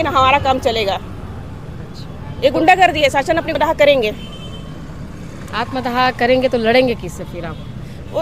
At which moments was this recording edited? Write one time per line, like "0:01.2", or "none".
0:03.5